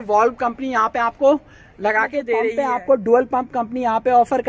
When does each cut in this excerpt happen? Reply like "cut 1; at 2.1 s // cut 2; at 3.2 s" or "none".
cut 1; at 2.5 s

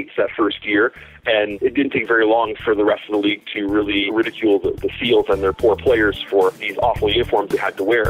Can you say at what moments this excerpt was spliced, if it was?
cut 1; at 1.5 s // cut 2; at 4.1 s // cut 3; at 6.6 s

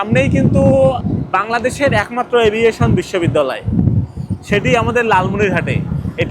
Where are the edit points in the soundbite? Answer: cut 1; at 1.0 s

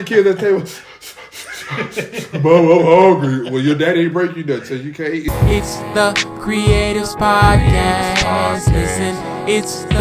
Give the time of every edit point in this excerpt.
cut 1; at 5.3 s

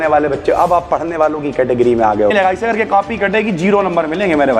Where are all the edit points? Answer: cut 1; at 2.3 s

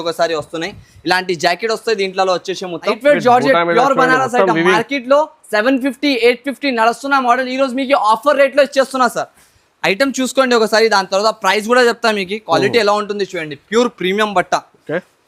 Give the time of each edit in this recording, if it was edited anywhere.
cut 1; at 3.0 s

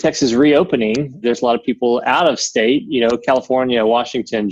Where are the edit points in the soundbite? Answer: cut 1; at 1.2 s

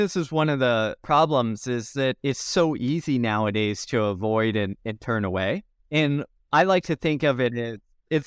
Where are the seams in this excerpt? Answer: cut 1; at 1.0 s // cut 2; at 6.3 s

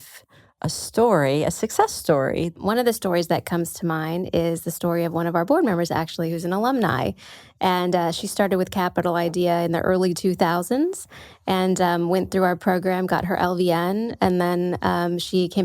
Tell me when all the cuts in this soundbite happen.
cut 1; at 2.5 s

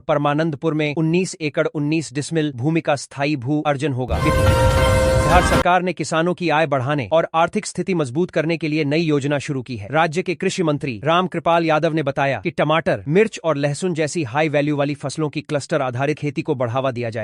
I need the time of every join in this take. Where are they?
cut 1; at 4.1 s // cut 2; at 5.3 s

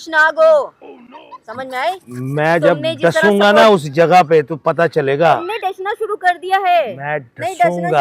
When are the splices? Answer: none

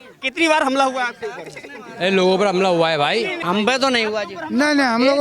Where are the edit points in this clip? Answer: cut 1; at 3.4 s

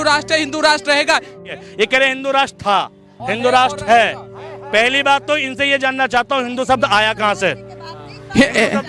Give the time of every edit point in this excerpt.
cut 1; at 1.5 s

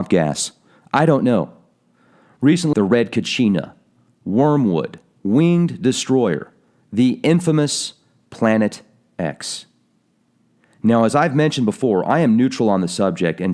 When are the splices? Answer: none

